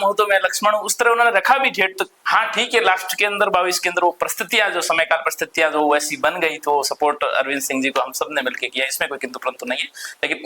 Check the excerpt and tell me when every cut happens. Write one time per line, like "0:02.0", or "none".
0:02.2